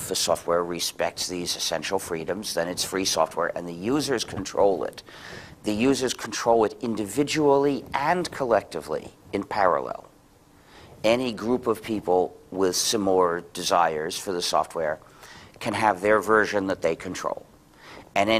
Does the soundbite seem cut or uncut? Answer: cut